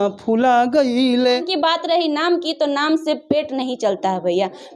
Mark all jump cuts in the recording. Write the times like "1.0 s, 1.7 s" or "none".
1.5 s